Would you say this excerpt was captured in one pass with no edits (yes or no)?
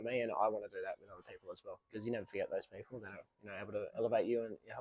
no